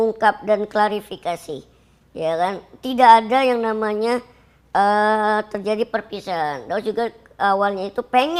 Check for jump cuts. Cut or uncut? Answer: uncut